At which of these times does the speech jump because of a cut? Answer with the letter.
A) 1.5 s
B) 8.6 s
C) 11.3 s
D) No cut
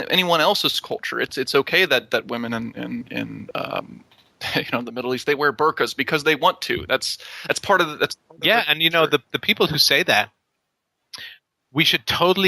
B